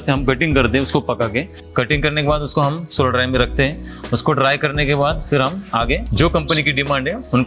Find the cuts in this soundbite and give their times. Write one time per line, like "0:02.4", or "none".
0:01.6
0:06.1